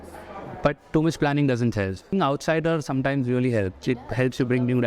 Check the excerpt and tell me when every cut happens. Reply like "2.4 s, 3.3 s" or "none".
2.1 s

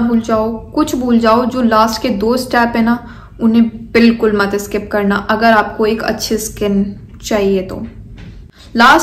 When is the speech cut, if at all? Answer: none

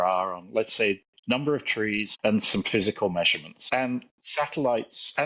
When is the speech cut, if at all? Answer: 1.1 s, 2.1 s, 3.5 s, 4.2 s

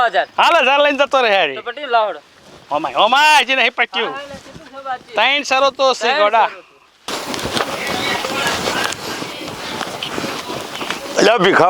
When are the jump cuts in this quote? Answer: 6.9 s

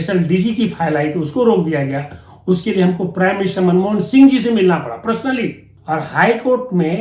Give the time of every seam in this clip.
5.7 s

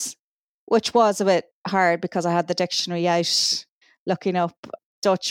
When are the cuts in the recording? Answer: none

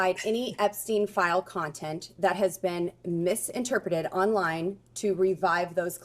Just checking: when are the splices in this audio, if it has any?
4.4 s

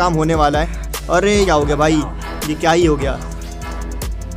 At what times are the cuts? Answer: 1.5 s

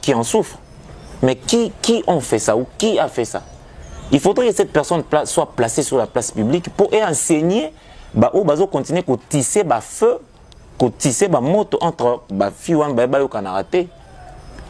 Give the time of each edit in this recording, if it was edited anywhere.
none

